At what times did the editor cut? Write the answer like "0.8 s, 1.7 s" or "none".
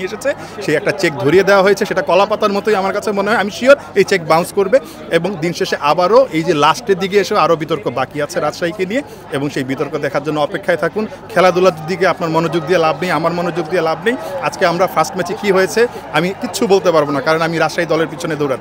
none